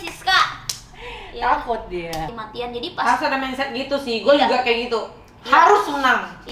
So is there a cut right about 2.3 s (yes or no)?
yes